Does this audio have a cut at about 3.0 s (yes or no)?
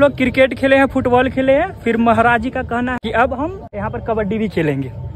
yes